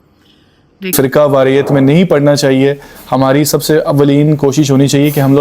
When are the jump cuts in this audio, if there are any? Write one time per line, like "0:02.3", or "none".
0:00.9